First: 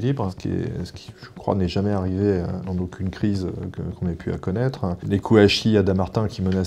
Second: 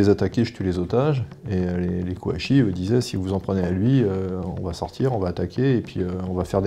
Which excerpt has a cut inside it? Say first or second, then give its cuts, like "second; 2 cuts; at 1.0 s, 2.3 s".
first; 2 cuts; at 2.6 s, 5.0 s